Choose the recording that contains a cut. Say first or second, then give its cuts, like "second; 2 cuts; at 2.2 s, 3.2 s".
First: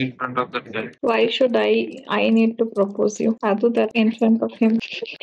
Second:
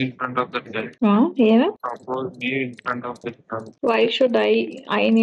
first; 1 cut; at 0.9 s